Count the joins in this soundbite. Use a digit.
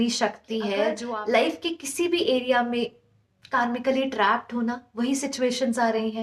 1